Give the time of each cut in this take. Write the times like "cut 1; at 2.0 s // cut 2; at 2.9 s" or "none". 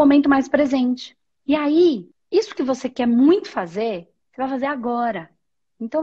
cut 1; at 2.1 s